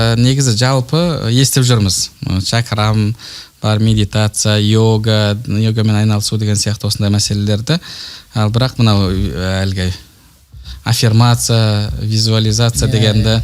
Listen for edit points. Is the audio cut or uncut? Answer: uncut